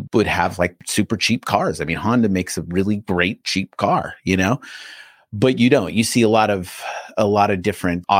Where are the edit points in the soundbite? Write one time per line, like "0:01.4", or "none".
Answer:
none